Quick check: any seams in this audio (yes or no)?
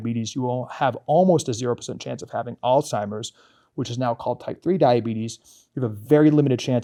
no